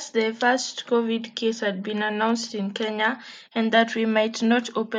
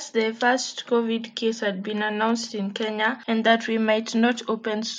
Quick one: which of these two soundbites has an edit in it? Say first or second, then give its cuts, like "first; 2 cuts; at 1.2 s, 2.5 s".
second; 1 cut; at 3.2 s